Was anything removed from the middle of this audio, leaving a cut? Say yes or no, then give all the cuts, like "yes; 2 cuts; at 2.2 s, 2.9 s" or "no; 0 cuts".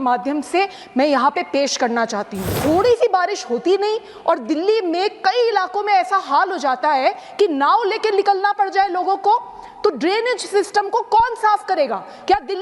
yes; 1 cut; at 2.5 s